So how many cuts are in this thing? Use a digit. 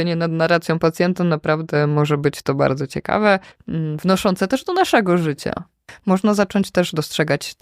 2